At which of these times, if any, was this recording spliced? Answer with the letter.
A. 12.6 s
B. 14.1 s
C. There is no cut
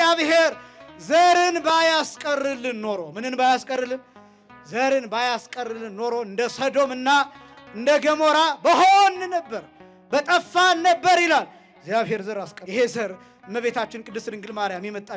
A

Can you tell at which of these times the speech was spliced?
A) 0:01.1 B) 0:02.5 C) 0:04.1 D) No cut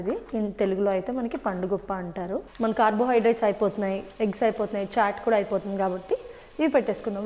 B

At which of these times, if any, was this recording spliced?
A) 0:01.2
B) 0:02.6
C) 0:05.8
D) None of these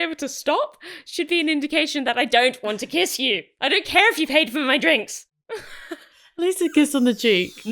C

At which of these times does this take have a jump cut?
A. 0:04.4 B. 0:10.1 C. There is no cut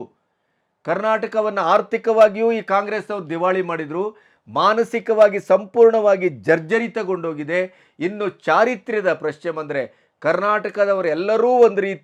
C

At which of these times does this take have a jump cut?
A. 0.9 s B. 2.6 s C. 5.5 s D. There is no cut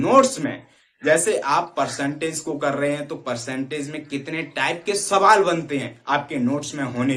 D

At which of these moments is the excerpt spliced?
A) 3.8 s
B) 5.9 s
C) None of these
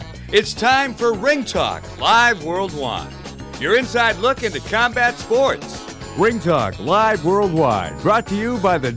B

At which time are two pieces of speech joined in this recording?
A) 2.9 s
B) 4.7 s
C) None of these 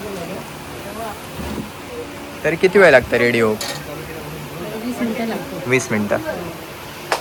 C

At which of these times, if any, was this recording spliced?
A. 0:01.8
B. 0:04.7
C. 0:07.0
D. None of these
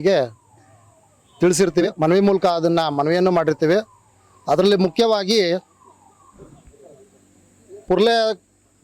A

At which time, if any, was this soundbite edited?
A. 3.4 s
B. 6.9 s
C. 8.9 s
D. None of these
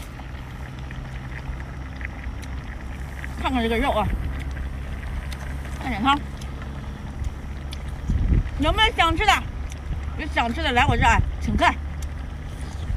D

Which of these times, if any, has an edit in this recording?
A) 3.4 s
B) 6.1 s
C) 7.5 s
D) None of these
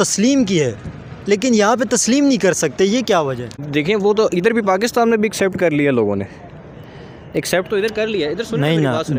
D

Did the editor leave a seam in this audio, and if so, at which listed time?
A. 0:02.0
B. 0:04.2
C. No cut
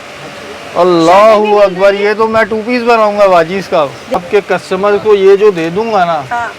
B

